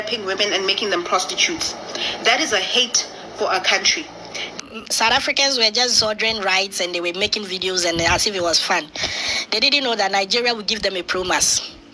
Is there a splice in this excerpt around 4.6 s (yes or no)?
yes